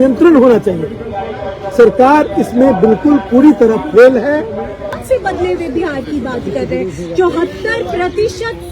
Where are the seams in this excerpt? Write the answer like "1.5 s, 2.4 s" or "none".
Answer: 4.9 s